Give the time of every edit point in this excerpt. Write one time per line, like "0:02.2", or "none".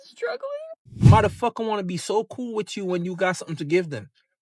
0:01.1